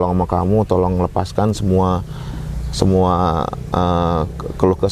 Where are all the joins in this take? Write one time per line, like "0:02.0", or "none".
none